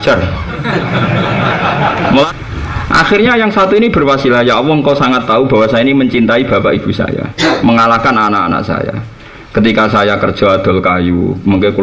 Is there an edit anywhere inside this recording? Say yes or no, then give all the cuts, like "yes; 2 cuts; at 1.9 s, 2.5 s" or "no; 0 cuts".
yes; 1 cut; at 2.3 s